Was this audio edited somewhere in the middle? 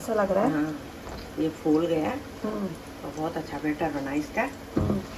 no; 0 cuts

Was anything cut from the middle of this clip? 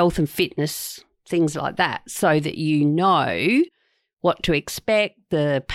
no; 0 cuts

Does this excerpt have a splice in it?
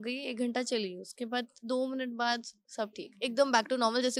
no; 0 cuts

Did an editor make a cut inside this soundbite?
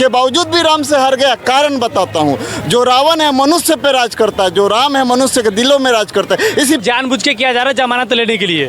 yes; 1 cut; at 6.8 s

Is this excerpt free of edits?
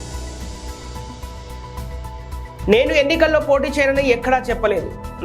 no; 1 cut; at 1.7 s

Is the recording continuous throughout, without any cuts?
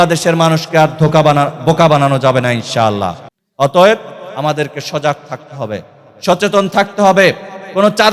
yes; 0 cuts

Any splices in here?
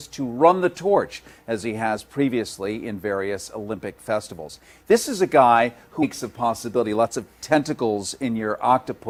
no; 0 cuts

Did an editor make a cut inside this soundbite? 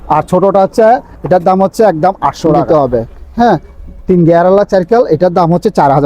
yes; 1 cut; at 2.6 s

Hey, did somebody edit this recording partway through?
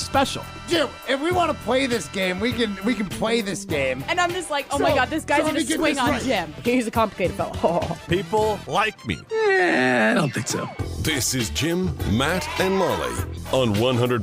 no; 0 cuts

